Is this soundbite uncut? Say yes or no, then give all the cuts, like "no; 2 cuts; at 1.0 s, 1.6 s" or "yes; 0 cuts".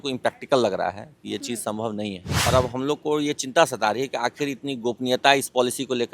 no; 1 cut; at 2.5 s